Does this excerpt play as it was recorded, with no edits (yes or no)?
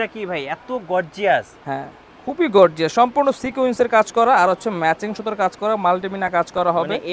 yes